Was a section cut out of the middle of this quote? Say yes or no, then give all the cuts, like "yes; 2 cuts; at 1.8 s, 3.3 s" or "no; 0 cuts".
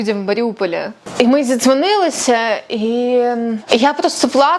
yes; 2 cuts; at 1.0 s, 3.7 s